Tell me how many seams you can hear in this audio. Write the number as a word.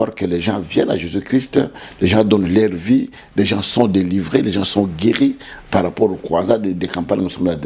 zero